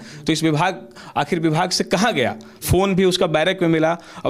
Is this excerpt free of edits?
yes; 0 cuts

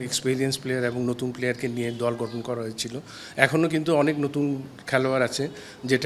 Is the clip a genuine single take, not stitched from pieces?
yes; 0 cuts

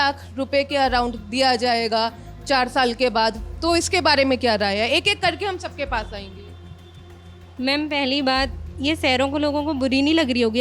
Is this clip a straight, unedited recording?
yes; 0 cuts

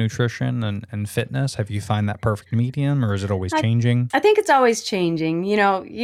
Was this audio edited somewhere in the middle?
no; 0 cuts

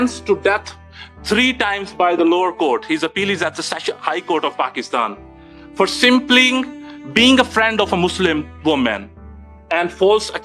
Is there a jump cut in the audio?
no; 0 cuts

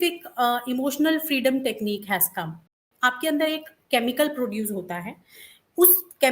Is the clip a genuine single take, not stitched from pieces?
no; 1 cut; at 2.8 s

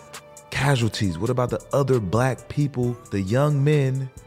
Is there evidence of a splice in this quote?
yes; 1 cut; at 3.0 s

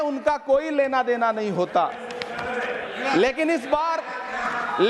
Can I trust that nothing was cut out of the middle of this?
yes; 0 cuts

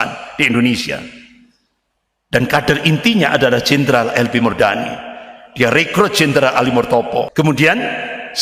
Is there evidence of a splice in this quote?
yes; 1 cut; at 7.3 s

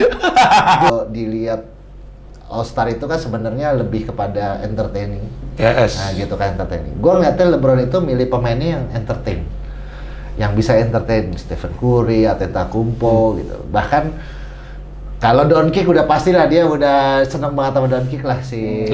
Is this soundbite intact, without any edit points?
no; 1 cut; at 0.9 s

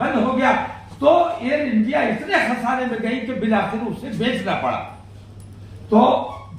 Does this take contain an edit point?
no; 0 cuts

